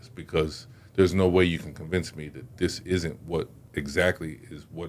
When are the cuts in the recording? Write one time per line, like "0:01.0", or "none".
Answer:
0:03.6